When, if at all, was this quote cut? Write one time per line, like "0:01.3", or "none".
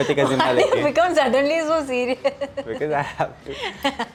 none

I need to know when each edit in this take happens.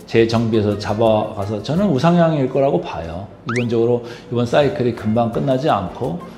none

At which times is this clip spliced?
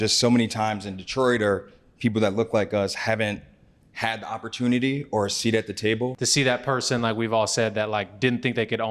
0:06.2

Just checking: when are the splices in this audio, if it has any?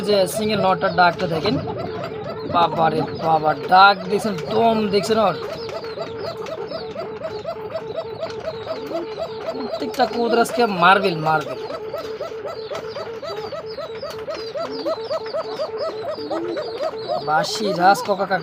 none

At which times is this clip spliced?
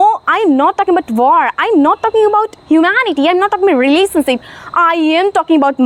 none

